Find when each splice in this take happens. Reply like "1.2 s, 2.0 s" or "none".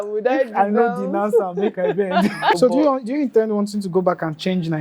2.6 s